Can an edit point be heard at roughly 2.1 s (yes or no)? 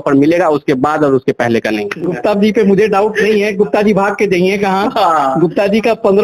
yes